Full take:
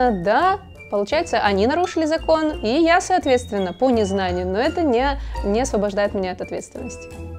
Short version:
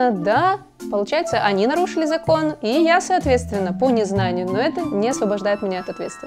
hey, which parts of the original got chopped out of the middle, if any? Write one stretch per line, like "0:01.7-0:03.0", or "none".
0:04.8-0:05.3

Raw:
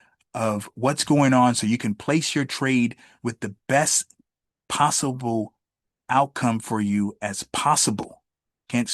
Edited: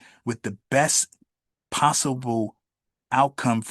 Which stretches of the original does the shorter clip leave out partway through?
none

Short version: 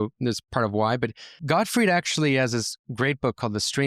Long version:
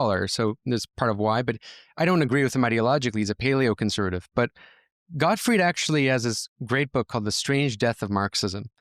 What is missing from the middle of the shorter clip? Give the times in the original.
0:01.7-0:05.0

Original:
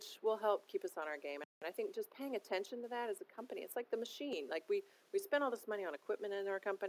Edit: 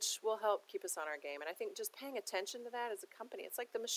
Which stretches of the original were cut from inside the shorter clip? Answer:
0:01.4-0:01.6

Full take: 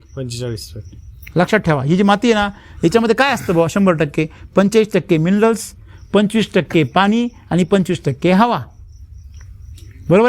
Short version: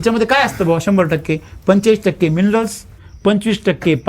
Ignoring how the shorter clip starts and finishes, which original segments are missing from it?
none

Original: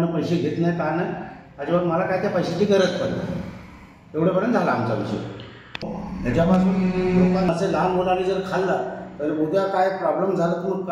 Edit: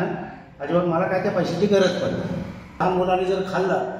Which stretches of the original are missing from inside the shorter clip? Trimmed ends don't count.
0:03.8-0:07.8

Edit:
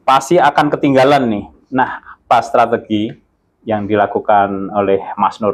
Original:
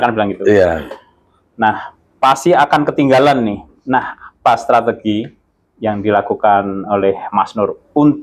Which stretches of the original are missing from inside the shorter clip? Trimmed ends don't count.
none

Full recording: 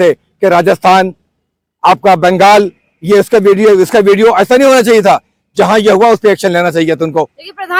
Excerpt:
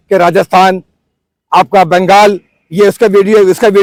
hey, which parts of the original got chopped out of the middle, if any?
none

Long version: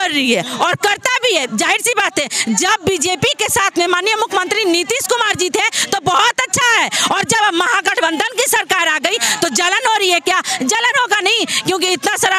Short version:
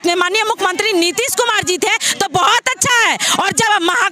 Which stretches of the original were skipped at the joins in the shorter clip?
none

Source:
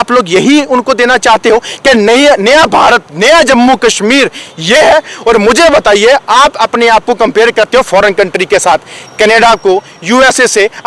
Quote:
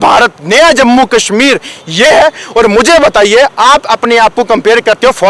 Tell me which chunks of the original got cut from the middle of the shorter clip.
none

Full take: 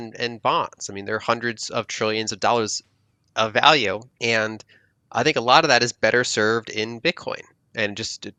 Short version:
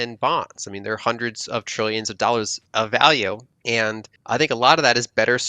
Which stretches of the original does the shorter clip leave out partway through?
0:02.8-0:03.2
0:04.3-0:04.5

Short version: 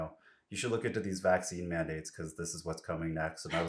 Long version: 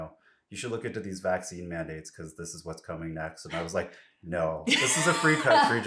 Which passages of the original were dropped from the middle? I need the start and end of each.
none

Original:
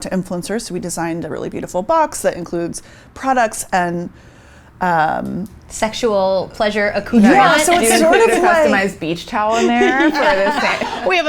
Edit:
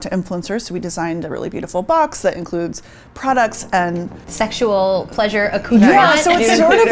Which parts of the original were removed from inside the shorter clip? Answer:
0:04.2-0:05.6

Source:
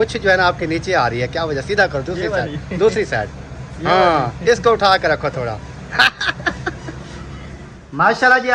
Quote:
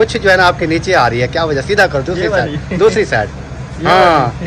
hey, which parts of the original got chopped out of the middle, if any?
none

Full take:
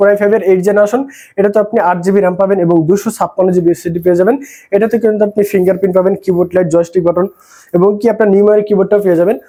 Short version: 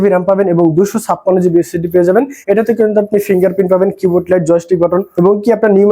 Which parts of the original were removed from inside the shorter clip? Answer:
0:04.5-0:04.6
0:07.3-0:07.7

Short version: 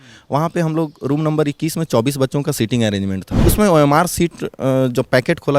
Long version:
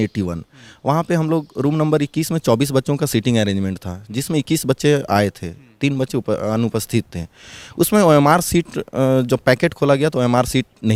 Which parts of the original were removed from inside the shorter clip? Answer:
0:03.8-0:07.6

